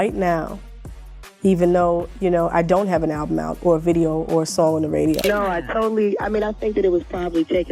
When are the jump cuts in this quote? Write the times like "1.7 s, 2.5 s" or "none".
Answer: 5.2 s